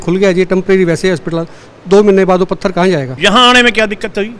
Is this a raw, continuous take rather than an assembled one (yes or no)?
no